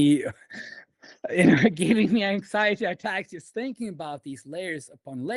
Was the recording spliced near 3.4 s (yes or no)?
no